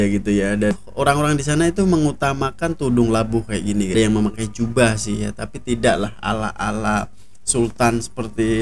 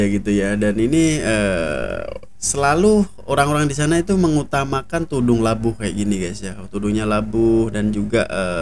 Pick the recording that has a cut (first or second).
first